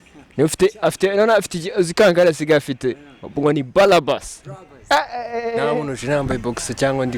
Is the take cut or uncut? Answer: cut